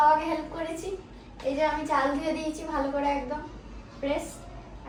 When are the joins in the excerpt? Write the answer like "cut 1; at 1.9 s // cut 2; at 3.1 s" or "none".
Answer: none

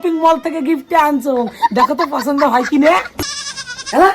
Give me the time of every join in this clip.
cut 1; at 3.2 s

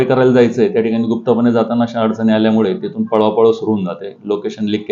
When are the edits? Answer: none

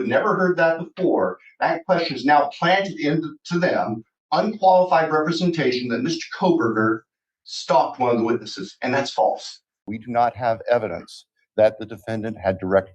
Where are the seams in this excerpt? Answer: cut 1; at 9.7 s

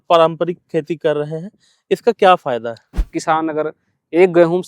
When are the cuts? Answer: cut 1; at 3.1 s

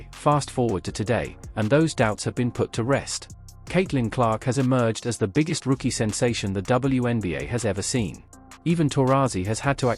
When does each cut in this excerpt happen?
cut 1; at 4.5 s

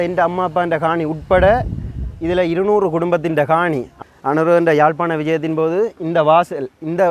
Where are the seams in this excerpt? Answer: cut 1; at 3.9 s

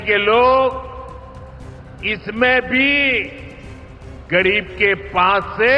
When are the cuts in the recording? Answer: none

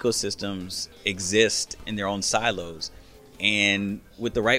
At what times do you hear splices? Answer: cut 1; at 1.8 s

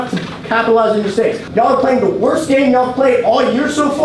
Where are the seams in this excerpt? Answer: cut 1; at 1.4 s

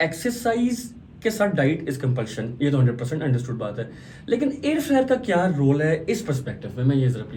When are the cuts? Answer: none

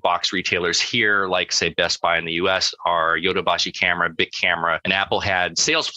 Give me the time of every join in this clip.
cut 1; at 1.5 s // cut 2; at 4.8 s

